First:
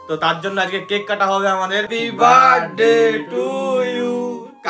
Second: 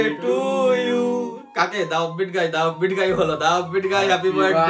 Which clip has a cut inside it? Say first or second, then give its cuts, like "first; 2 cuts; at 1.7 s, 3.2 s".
first; 1 cut; at 2.0 s